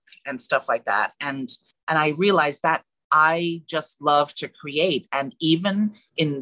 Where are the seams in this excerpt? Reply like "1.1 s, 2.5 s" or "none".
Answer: 1.7 s, 2.9 s